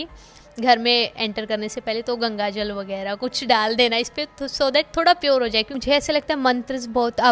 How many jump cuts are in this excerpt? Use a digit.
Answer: 1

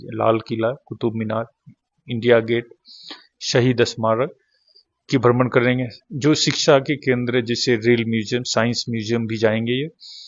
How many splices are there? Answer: 0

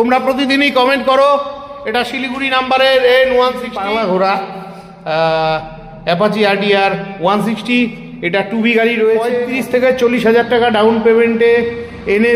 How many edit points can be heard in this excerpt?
2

